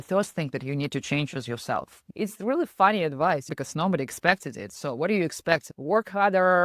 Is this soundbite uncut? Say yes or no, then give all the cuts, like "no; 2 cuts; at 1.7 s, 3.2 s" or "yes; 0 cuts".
no; 2 cuts; at 2.0 s, 5.7 s